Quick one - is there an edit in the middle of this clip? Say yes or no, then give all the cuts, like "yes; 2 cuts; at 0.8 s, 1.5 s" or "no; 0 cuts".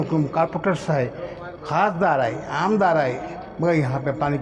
no; 0 cuts